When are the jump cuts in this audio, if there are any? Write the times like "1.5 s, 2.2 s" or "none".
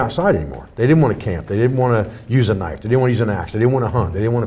none